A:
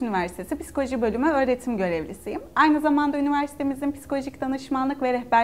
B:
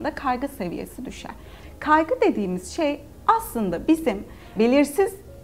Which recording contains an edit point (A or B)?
B